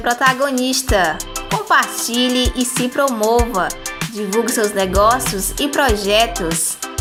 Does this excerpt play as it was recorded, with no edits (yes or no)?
yes